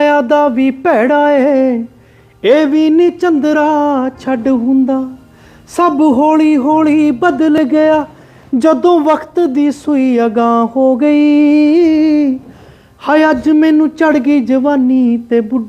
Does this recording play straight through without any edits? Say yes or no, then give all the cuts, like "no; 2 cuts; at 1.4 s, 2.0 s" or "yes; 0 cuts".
yes; 0 cuts